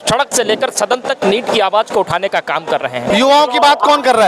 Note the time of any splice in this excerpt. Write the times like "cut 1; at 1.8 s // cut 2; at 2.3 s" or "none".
cut 1; at 3.0 s